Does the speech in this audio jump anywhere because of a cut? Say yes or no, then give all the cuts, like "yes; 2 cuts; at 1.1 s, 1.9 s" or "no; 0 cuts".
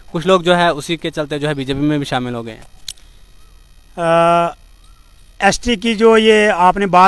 no; 0 cuts